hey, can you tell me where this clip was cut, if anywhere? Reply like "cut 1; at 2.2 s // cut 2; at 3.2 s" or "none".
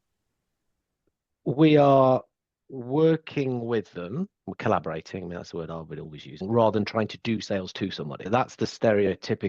cut 1; at 6.4 s // cut 2; at 8.3 s